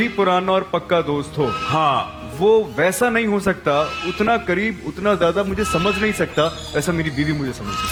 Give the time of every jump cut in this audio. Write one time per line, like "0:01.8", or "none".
none